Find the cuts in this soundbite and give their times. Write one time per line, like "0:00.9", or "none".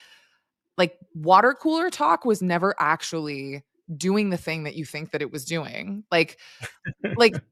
none